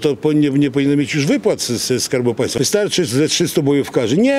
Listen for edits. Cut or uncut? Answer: cut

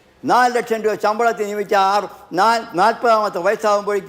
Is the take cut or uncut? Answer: uncut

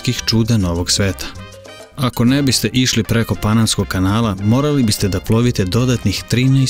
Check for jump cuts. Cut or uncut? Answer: cut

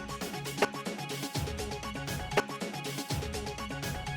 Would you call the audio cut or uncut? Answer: uncut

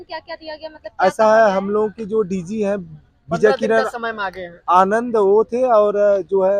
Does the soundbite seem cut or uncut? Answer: uncut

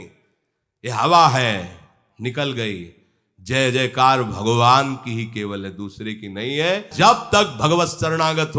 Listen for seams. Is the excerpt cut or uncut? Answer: cut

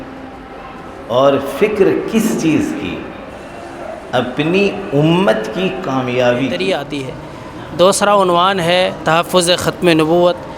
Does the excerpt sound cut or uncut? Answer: cut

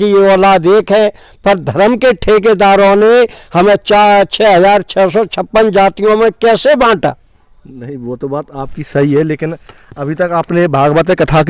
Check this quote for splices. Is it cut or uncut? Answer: uncut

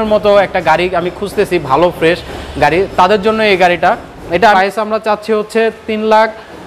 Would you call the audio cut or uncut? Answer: cut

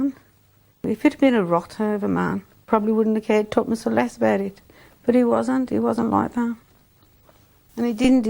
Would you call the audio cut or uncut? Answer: cut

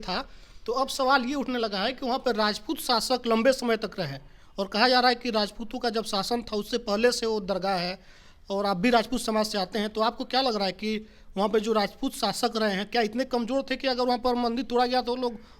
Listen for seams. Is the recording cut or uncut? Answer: uncut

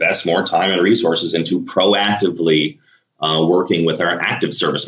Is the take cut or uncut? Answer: uncut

